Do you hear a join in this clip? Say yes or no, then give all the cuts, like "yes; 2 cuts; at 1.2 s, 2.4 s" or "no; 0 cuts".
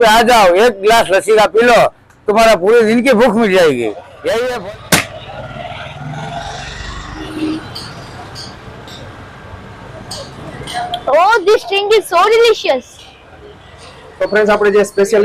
no; 0 cuts